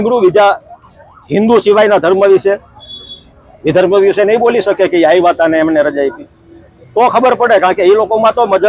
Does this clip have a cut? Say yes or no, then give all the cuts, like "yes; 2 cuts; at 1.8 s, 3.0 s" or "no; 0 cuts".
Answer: no; 0 cuts